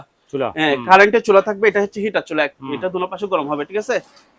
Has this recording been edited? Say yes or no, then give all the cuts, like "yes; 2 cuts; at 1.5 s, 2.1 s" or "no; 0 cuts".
no; 0 cuts